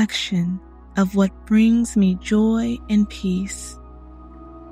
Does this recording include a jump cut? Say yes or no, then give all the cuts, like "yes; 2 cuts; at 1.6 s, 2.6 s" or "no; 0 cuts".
yes; 1 cut; at 3.5 s